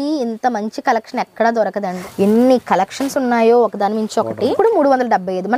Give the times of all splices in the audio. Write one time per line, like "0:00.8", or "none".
0:01.9
0:04.6